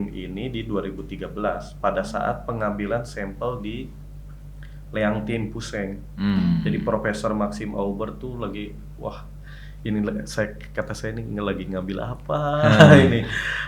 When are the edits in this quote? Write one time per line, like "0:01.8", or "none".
none